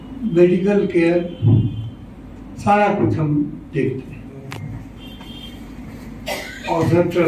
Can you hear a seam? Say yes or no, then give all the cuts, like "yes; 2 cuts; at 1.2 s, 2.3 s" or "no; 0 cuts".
yes; 1 cut; at 4.5 s